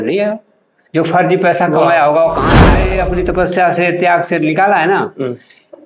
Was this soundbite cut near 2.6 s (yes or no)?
yes